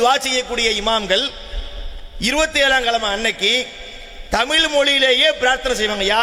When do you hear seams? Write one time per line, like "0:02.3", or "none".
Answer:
none

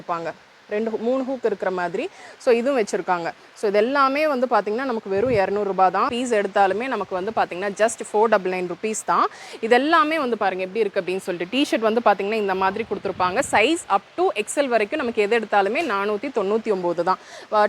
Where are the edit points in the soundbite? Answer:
0:06.1

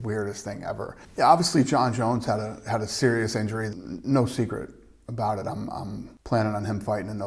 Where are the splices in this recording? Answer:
0:01.0
0:03.7
0:06.1

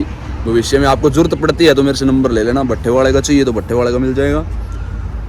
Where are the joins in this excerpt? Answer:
none

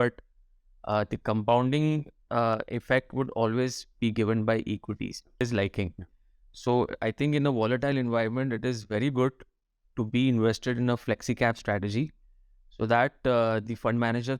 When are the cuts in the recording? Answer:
0:05.4

